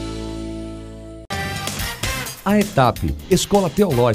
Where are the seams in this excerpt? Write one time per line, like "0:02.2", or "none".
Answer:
0:01.2